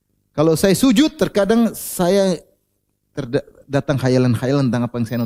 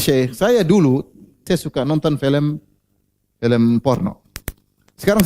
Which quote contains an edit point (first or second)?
second